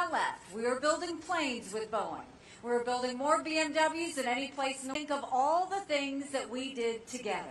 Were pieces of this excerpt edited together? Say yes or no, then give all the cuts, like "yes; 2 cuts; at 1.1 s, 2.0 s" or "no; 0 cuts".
no; 0 cuts